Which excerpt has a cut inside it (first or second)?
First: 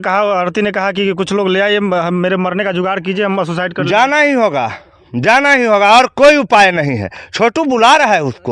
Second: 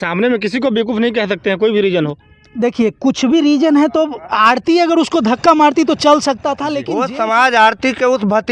second